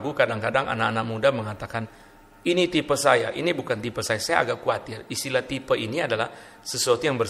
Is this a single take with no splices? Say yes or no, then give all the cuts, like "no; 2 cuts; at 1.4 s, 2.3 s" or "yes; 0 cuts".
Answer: yes; 0 cuts